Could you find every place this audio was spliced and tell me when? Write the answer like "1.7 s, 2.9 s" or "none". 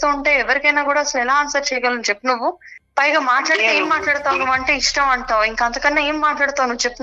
none